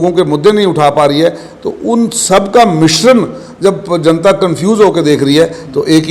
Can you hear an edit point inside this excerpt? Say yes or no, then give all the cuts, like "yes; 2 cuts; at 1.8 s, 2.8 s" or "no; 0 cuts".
no; 0 cuts